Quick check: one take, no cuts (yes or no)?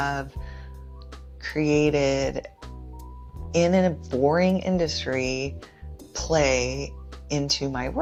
yes